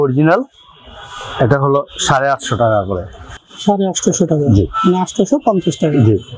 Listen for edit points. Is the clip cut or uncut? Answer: uncut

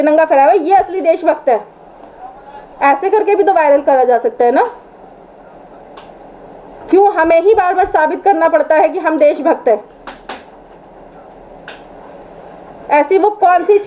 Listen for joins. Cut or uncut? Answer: uncut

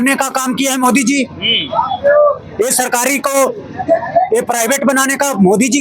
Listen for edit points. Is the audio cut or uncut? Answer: uncut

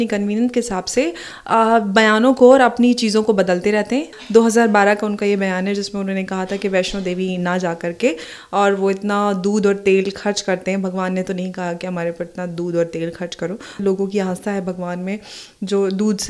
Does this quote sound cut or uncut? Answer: cut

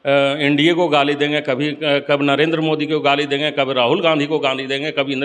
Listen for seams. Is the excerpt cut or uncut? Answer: uncut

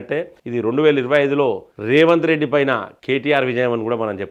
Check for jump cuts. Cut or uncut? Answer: uncut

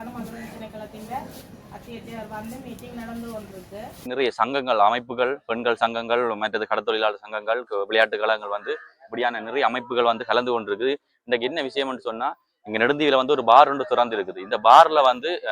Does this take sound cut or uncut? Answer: cut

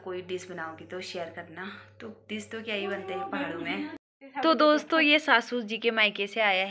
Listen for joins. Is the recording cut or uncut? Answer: cut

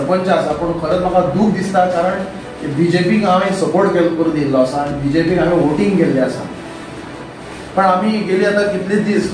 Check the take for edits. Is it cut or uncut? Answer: uncut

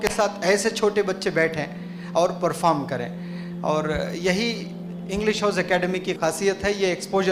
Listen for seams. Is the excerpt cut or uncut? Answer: uncut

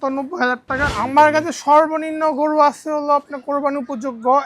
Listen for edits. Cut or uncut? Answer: cut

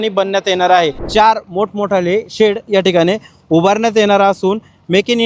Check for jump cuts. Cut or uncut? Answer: cut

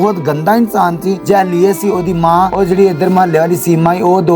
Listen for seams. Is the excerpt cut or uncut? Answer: cut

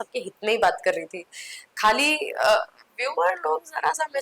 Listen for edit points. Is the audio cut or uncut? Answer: uncut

